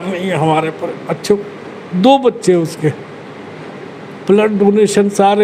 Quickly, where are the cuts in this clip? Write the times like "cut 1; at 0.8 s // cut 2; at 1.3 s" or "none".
none